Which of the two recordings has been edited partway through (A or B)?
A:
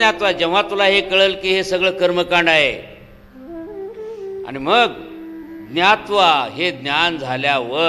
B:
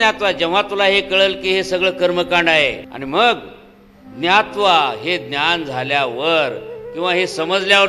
B